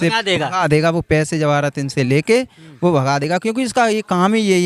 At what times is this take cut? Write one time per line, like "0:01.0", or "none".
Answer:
none